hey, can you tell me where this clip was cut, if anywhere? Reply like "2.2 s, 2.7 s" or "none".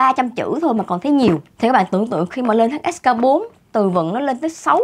none